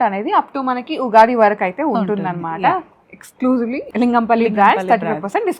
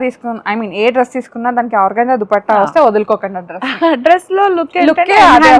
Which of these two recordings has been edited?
first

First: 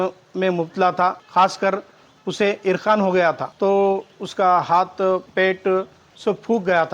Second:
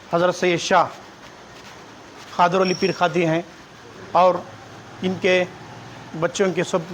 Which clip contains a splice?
first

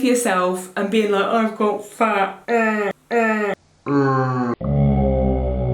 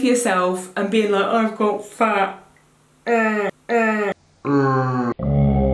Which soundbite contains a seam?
first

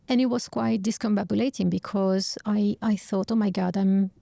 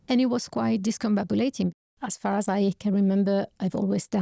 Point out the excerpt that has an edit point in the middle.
second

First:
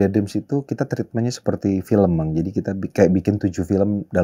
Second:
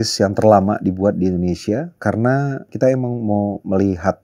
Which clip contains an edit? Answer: second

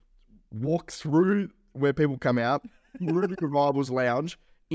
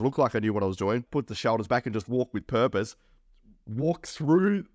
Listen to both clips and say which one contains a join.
second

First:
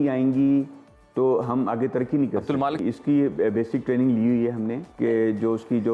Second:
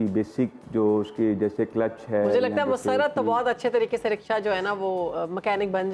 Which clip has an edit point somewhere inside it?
first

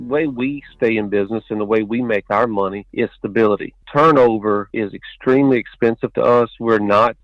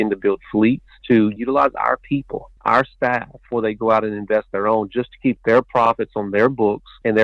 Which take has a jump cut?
second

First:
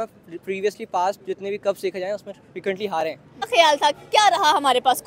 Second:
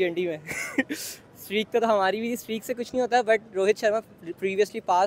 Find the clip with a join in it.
first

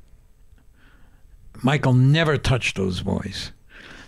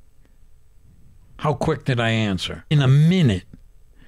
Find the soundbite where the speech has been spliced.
second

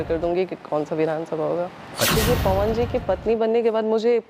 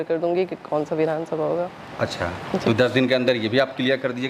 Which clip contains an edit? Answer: first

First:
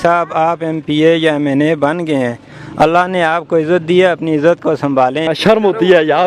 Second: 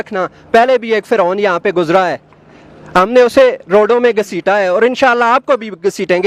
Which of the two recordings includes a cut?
first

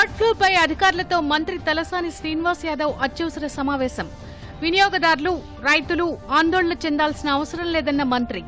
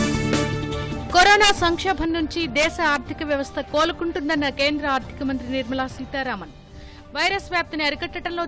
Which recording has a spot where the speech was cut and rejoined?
second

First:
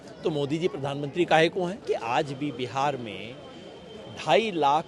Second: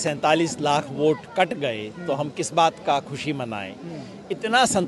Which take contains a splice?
first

